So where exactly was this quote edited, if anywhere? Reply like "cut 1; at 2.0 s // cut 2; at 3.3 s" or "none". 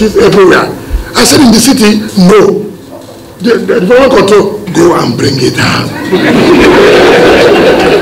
none